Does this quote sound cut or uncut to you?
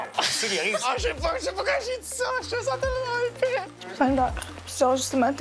cut